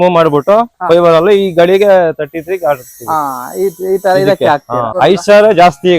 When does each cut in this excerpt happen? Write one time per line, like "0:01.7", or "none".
0:04.9